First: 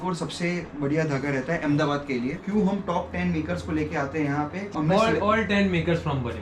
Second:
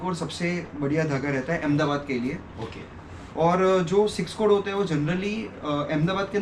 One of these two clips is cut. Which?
first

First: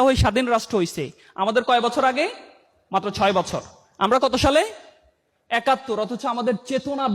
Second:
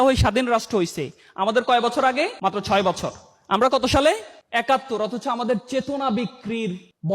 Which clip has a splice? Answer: second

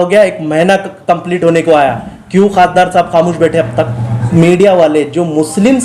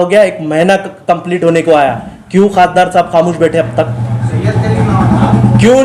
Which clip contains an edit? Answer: first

